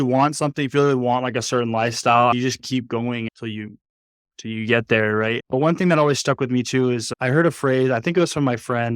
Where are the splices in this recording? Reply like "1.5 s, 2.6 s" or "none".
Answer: none